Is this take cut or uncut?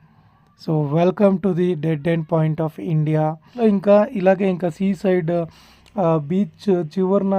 cut